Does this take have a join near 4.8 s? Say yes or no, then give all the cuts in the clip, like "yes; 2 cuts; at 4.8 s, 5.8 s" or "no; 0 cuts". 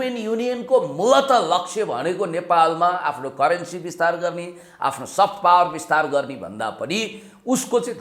no; 0 cuts